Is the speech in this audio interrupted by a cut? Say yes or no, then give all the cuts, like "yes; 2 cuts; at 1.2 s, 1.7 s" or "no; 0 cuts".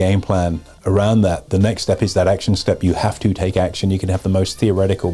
no; 0 cuts